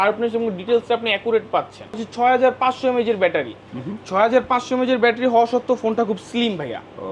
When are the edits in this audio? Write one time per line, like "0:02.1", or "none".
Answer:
0:02.0